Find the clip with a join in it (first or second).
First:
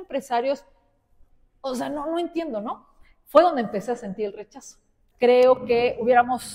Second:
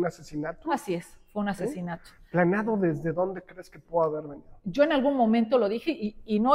first